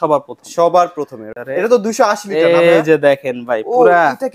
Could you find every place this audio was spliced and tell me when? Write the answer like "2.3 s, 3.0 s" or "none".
1.2 s